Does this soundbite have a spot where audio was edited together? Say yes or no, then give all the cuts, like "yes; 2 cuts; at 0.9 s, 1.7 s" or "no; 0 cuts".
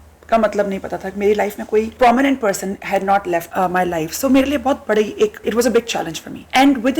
yes; 2 cuts; at 1.9 s, 3.5 s